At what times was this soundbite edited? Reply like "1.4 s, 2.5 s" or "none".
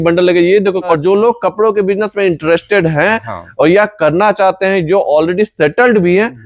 1.0 s